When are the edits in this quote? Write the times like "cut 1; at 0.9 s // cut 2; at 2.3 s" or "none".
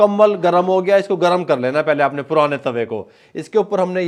none